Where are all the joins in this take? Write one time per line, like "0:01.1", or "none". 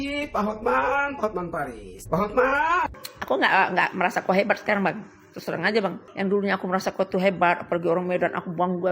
0:02.9
0:06.0